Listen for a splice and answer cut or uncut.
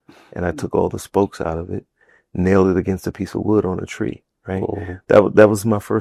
uncut